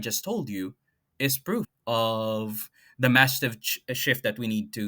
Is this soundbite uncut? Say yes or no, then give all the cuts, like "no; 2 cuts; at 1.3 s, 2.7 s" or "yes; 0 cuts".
no; 1 cut; at 1.7 s